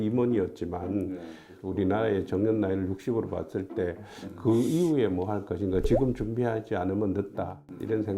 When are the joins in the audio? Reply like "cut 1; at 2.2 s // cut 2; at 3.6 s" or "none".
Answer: cut 1; at 1.6 s

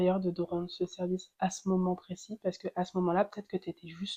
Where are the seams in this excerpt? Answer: none

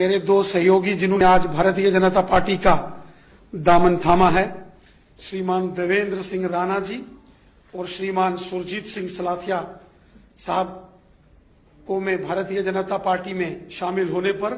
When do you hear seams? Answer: cut 1; at 1.2 s

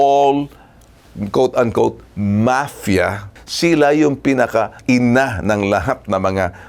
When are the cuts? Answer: cut 1; at 3.3 s // cut 2; at 4.8 s

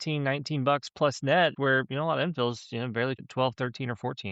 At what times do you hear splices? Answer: cut 1; at 1.5 s // cut 2; at 3.2 s

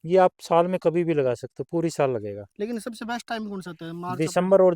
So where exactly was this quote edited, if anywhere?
none

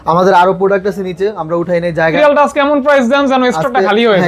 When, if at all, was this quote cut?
cut 1; at 2.2 s

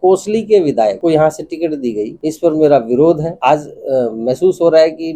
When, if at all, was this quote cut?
cut 1; at 1.0 s // cut 2; at 2.1 s // cut 3; at 3.3 s

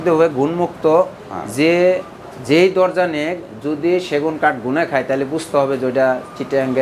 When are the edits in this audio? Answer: none

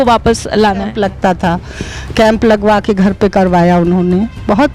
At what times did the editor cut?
cut 1; at 0.9 s

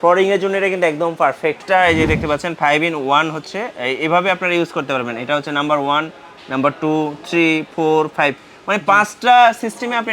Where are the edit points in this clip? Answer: cut 1; at 1.6 s

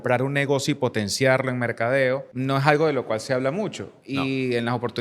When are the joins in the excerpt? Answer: cut 1; at 2.3 s

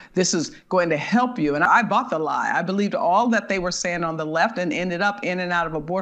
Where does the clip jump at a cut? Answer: cut 1; at 1.6 s

